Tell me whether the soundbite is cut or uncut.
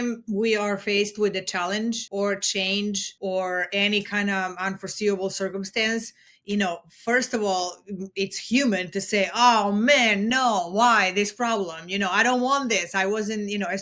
cut